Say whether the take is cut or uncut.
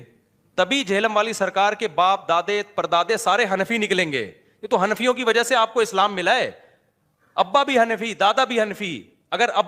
uncut